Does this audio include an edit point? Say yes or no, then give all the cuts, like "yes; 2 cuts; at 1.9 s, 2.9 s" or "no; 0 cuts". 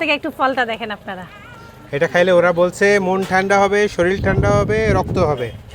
no; 0 cuts